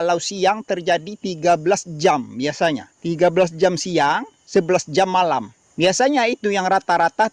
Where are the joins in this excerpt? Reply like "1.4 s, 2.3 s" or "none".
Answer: 2.9 s, 4.3 s, 5.6 s